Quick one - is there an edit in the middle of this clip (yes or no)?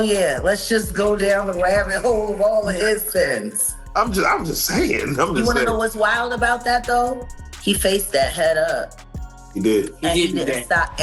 no